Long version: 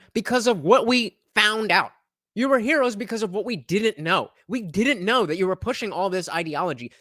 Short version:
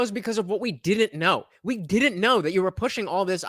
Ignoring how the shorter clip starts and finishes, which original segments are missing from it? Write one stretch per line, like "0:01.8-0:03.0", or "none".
none

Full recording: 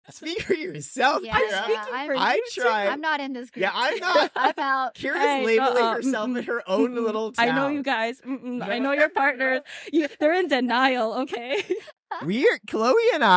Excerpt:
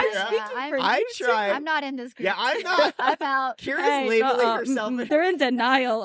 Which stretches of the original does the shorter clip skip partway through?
0:06.4-0:10.1

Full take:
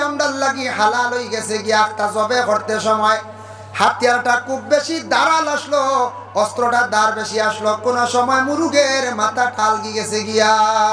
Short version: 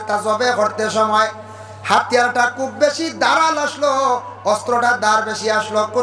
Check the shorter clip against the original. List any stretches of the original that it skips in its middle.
none

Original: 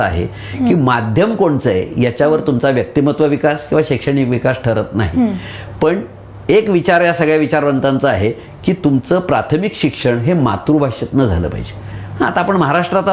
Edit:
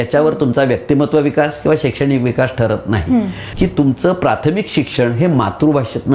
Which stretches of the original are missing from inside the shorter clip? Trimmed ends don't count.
0:05.5-0:08.5

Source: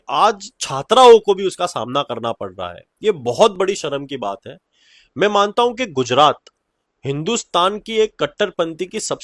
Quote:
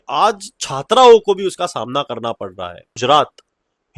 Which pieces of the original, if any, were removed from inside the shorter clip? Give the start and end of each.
0:03.0-0:06.1

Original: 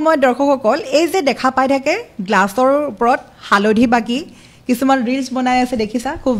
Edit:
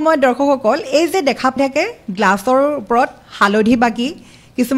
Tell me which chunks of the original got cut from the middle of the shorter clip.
0:01.6-0:01.7

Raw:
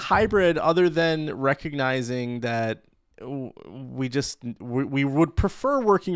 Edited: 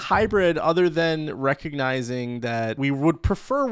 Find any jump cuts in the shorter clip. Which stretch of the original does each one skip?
0:02.8-0:04.9

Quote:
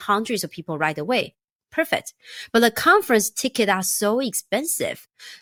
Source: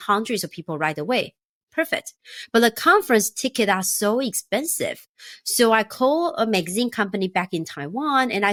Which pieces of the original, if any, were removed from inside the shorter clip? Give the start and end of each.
none

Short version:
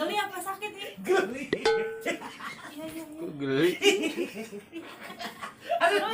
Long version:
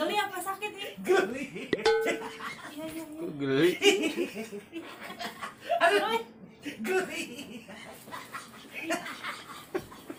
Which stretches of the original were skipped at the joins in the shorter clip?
none

